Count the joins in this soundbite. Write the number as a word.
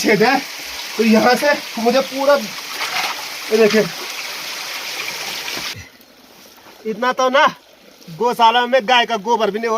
one